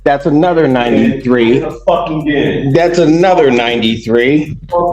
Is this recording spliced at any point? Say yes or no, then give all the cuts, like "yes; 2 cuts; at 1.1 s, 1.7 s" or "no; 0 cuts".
no; 0 cuts